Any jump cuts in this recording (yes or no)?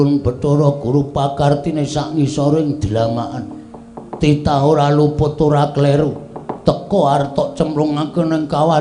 no